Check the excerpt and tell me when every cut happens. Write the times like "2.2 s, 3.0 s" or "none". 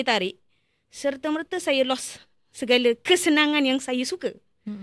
none